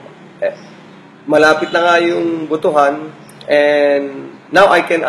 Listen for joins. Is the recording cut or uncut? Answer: uncut